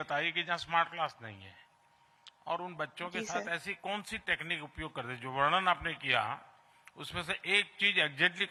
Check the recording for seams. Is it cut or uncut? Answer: uncut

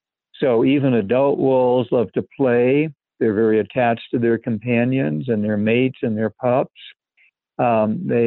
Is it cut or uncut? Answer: cut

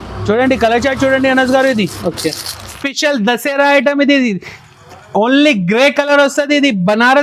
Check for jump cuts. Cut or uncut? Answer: cut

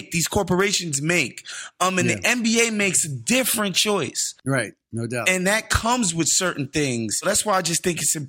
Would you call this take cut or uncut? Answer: cut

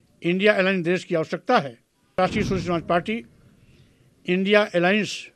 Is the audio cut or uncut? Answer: cut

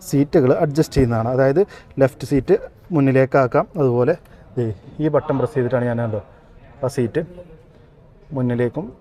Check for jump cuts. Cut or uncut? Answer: uncut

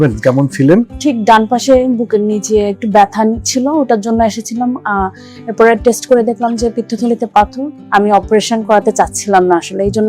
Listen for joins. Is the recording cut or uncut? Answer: cut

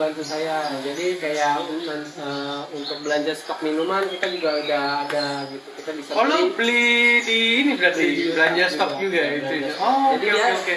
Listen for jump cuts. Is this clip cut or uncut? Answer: uncut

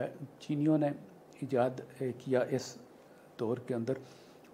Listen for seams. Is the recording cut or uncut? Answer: uncut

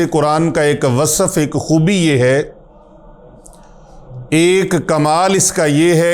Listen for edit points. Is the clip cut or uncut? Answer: uncut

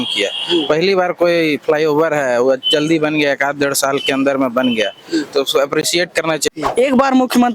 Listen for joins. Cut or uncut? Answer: cut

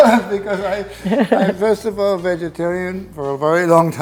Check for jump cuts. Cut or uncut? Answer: uncut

